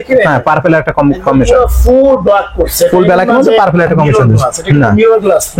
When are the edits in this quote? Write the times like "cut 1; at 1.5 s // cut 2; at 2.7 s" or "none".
none